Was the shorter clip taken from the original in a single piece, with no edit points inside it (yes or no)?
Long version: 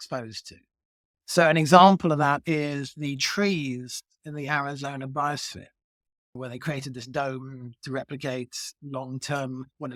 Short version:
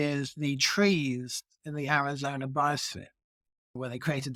yes